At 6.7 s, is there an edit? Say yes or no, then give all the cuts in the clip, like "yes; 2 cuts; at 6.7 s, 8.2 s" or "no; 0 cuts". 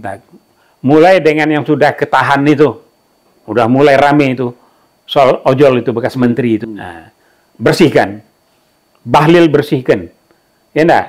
yes; 1 cut; at 6.7 s